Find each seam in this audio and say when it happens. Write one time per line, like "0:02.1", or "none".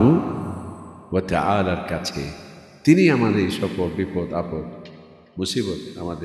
none